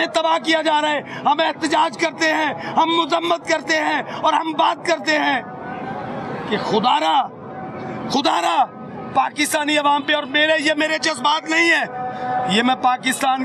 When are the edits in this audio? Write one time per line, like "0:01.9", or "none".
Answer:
none